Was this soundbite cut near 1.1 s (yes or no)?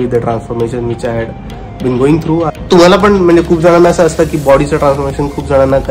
no